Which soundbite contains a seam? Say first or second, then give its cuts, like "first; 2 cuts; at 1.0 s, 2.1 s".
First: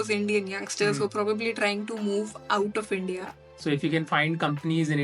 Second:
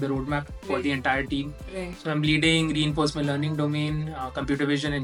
first; 1 cut; at 3.4 s